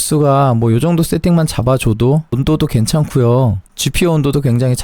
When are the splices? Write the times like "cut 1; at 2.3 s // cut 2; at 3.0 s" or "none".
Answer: cut 1; at 2.4 s // cut 2; at 3.7 s